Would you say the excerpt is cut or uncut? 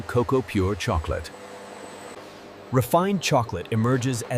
cut